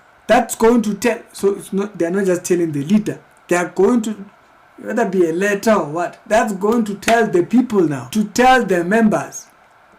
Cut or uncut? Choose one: cut